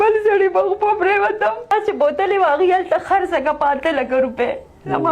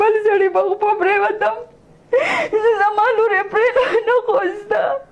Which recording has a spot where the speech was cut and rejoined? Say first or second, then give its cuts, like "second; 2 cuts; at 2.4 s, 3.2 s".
first; 1 cut; at 1.7 s